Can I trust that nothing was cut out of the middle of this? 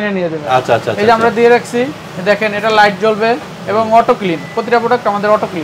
yes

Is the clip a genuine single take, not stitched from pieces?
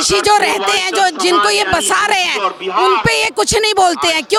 yes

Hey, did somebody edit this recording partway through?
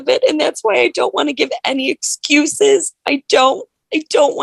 no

